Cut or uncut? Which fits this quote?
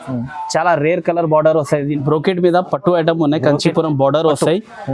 cut